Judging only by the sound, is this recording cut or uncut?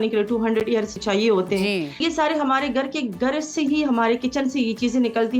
cut